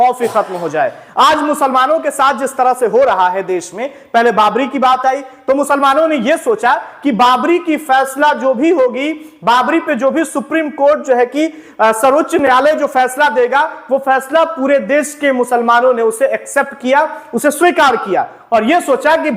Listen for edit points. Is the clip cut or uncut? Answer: uncut